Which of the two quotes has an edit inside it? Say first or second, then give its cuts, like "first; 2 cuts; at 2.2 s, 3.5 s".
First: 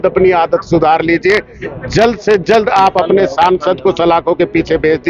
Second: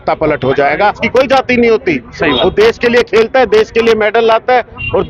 second; 1 cut; at 1.0 s